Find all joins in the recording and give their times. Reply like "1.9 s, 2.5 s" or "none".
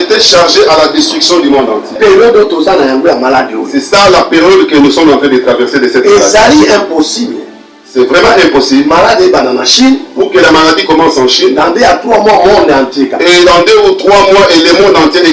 2.0 s